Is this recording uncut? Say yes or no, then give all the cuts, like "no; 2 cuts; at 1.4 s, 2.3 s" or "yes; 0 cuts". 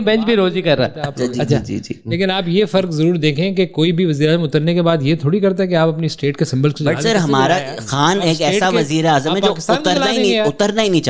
yes; 0 cuts